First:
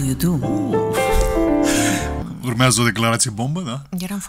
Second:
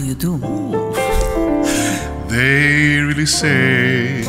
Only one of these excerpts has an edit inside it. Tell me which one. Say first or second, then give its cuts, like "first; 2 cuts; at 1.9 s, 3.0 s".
first; 1 cut; at 2.2 s